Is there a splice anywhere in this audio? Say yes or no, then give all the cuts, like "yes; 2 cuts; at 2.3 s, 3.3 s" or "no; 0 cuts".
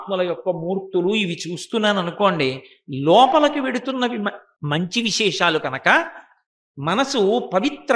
yes; 1 cut; at 4.5 s